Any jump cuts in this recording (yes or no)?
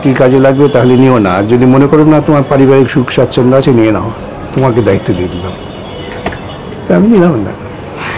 no